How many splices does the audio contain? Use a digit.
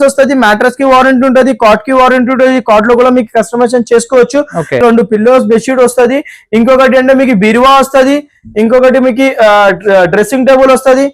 1